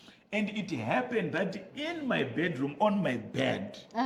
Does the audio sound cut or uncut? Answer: uncut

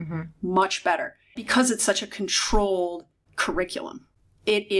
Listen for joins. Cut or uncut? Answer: cut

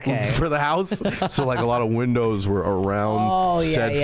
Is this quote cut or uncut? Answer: uncut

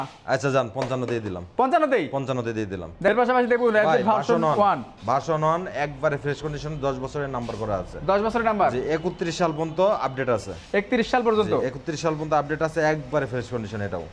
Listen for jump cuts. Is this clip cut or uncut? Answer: uncut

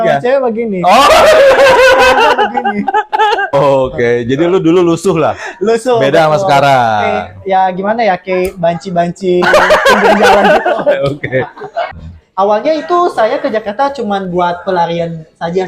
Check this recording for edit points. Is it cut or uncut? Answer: cut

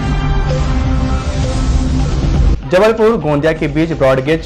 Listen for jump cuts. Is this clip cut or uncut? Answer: uncut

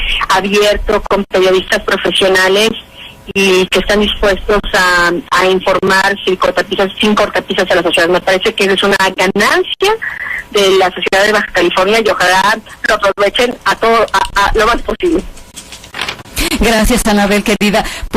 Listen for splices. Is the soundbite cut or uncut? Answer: cut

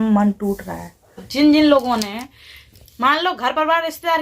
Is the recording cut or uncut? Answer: cut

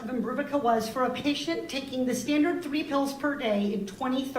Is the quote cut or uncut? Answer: cut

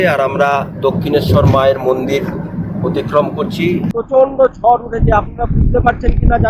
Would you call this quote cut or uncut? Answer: cut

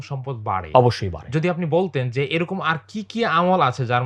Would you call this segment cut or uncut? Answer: uncut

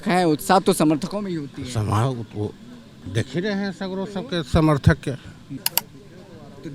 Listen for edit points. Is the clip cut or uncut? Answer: cut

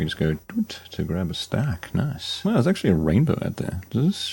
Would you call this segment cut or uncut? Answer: cut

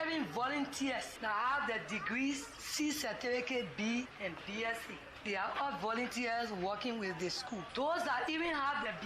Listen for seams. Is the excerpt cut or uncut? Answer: cut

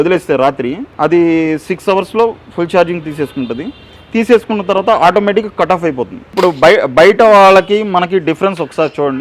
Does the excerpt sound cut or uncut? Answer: cut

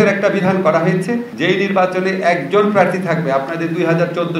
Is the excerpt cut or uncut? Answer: cut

